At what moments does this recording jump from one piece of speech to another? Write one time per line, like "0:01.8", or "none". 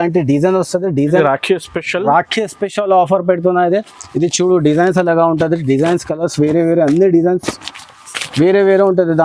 0:01.2